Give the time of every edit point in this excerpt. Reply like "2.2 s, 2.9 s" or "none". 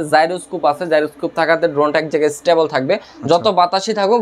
none